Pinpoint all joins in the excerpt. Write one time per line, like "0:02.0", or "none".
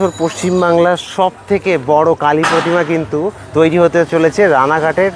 none